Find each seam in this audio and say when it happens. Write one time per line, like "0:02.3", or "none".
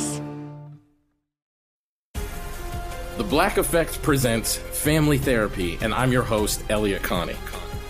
0:01.4